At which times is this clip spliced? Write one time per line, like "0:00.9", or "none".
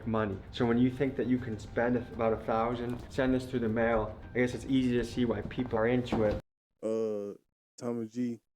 none